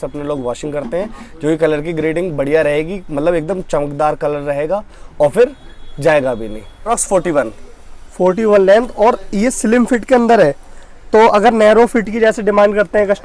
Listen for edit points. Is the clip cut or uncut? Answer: cut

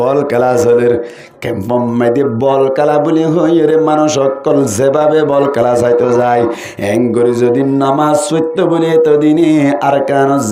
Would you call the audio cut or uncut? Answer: uncut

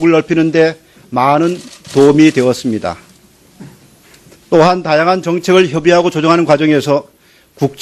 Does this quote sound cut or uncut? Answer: uncut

